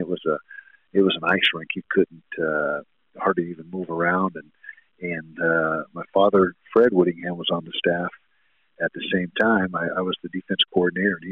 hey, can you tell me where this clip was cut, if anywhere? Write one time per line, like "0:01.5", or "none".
none